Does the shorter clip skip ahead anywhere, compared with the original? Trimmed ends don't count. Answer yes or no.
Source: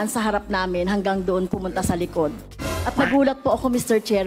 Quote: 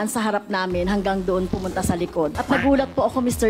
yes